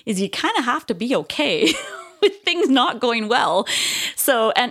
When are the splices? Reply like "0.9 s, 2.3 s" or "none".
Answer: none